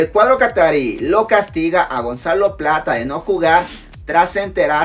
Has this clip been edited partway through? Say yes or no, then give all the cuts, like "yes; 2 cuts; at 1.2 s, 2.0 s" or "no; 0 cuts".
no; 0 cuts